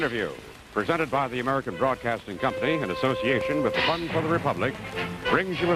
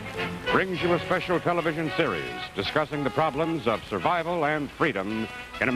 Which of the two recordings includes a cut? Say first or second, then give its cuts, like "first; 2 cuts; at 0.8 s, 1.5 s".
second; 1 cut; at 4.2 s